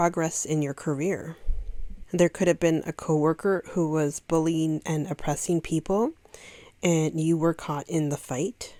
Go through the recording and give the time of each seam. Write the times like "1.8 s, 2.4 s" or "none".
none